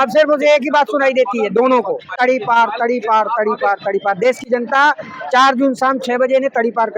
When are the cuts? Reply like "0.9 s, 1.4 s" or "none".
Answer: 2.1 s